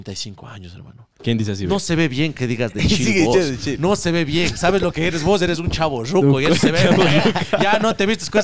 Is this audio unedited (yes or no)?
yes